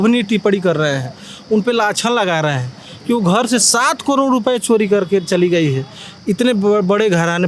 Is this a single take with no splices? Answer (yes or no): yes